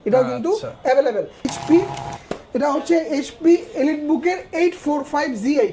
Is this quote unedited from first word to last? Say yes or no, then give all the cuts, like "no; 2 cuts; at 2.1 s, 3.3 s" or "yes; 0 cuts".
no; 1 cut; at 1.5 s